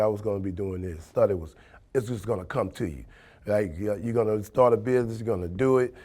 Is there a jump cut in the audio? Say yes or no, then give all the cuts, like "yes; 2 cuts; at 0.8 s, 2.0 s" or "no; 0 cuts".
yes; 1 cut; at 1.1 s